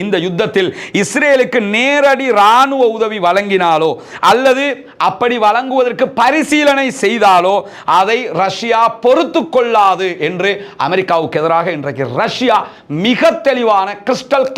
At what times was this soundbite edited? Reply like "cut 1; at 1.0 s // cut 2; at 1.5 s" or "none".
none